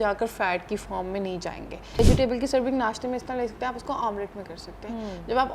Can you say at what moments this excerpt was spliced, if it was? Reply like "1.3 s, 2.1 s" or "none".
2.0 s